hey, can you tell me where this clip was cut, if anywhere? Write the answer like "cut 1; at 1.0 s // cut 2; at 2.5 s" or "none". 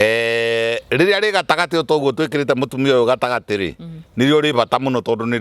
none